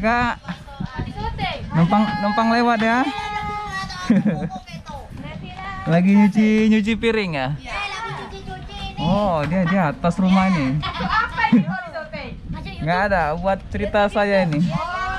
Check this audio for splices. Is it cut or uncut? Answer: uncut